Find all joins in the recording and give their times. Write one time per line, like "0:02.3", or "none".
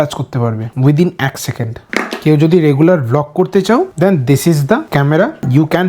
0:01.8